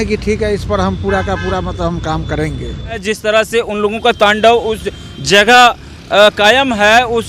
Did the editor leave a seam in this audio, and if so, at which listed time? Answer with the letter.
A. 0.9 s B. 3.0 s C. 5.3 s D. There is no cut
B